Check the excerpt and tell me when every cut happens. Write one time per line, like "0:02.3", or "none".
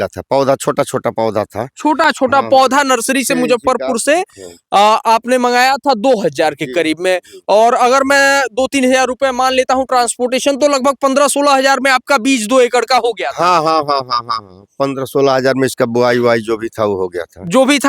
none